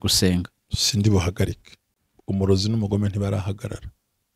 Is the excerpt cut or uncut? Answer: uncut